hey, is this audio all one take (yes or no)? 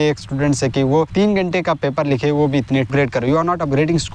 no